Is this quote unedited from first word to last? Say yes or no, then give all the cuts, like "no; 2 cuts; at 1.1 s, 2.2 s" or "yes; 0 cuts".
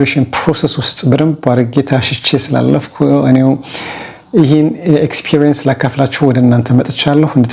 yes; 0 cuts